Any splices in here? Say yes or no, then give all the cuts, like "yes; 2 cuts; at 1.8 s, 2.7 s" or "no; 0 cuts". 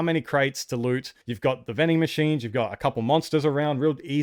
no; 0 cuts